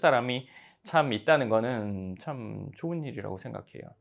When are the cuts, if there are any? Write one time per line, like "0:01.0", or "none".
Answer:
none